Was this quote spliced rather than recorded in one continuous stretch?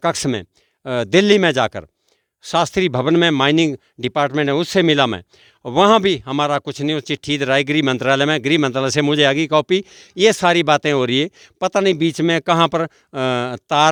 no; 0 cuts

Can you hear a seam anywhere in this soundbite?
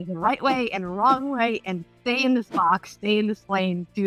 no; 0 cuts

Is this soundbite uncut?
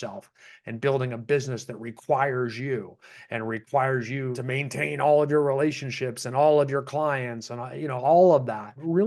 yes; 0 cuts

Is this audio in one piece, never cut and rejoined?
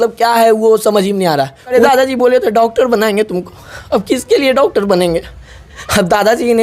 no; 1 cut; at 1.7 s

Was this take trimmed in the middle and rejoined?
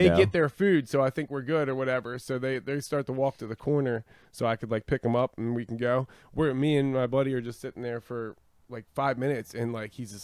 no; 0 cuts

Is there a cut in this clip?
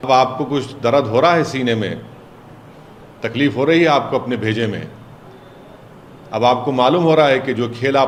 no; 0 cuts

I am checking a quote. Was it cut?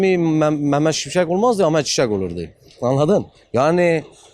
no; 0 cuts

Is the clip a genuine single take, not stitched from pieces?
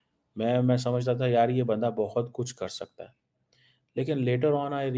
yes; 0 cuts

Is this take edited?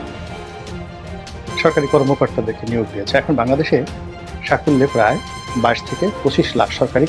no; 0 cuts

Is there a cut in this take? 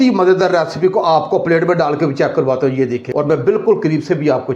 yes; 1 cut; at 3.0 s

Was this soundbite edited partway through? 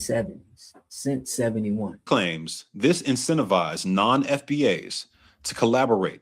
yes; 1 cut; at 2.0 s

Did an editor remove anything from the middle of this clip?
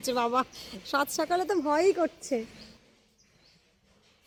no; 0 cuts

